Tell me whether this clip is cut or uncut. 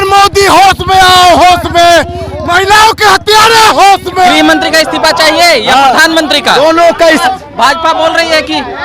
cut